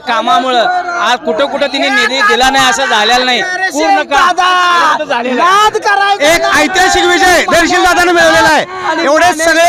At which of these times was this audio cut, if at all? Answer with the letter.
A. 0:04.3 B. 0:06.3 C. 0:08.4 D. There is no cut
D